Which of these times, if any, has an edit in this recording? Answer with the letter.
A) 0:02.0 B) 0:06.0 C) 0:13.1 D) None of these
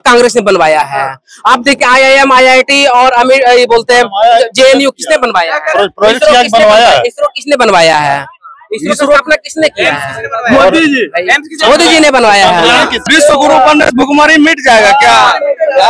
C